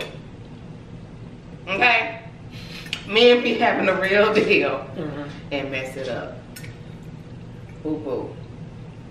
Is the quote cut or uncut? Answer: uncut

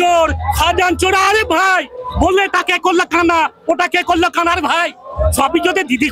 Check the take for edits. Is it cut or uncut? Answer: uncut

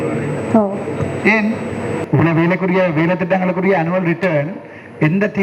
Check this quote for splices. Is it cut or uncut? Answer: cut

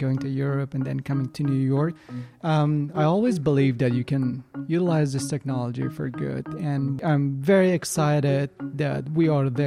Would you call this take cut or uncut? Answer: cut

